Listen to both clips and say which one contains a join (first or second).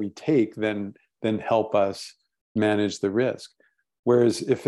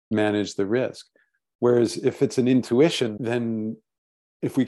second